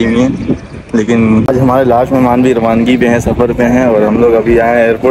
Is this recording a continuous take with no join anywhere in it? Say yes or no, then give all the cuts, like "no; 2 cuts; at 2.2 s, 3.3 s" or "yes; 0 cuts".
no; 1 cut; at 1.4 s